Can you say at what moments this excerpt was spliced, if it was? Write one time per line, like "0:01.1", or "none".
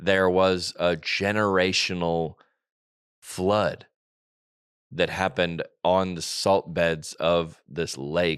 none